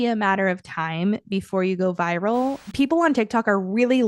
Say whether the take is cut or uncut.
cut